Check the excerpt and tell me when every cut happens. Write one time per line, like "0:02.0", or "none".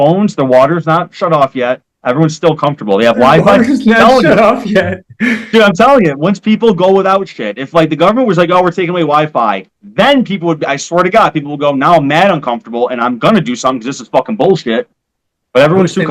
none